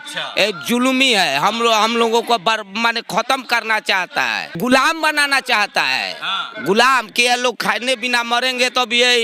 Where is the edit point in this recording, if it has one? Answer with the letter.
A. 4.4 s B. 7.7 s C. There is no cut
A